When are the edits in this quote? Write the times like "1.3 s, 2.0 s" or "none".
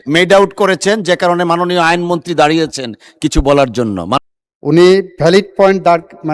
4.2 s